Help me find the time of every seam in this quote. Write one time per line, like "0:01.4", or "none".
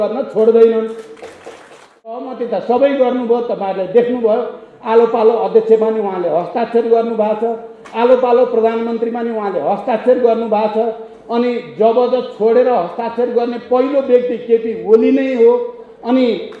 0:02.3